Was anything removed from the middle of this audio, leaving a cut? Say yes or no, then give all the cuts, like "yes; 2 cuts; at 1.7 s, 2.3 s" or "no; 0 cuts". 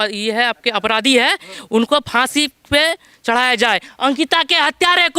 no; 0 cuts